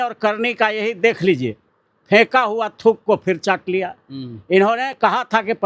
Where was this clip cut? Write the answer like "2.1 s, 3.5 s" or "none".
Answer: none